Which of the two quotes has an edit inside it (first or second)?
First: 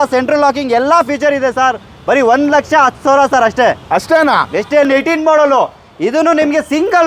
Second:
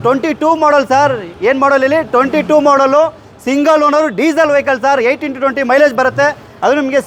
first